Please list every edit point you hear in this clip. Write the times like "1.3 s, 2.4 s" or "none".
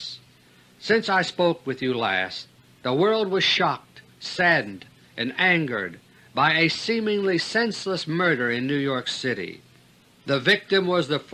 2.3 s